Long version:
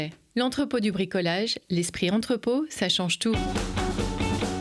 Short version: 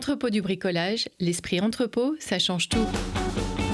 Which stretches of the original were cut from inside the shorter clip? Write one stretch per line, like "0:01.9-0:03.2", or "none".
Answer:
0:03.4-0:03.5